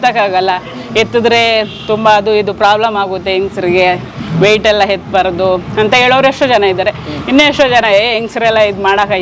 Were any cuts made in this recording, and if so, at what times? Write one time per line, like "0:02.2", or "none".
none